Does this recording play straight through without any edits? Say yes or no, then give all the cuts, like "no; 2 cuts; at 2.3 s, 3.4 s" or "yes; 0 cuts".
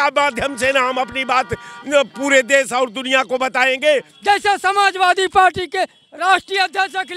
no; 1 cut; at 4.1 s